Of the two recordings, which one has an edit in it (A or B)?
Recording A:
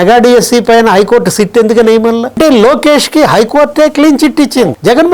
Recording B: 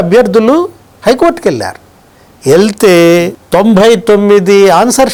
A